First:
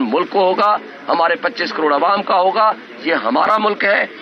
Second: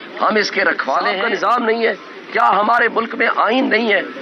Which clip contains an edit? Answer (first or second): second